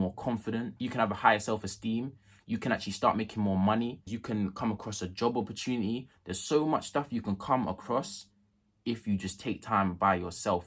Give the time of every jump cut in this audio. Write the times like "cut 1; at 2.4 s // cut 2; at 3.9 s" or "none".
none